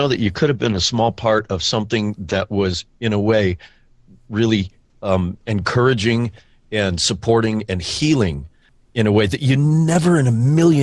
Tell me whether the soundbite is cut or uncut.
uncut